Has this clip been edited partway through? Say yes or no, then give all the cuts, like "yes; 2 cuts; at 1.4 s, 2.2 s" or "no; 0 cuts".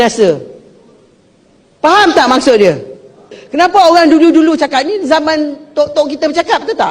yes; 1 cut; at 3.4 s